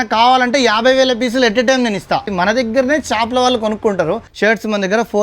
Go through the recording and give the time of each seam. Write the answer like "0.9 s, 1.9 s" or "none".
2.3 s, 4.3 s